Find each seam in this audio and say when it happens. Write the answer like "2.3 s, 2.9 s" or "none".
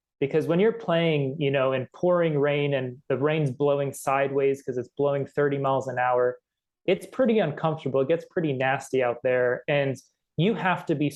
none